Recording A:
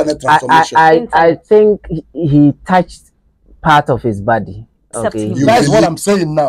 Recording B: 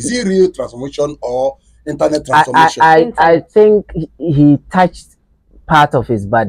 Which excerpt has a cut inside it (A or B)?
A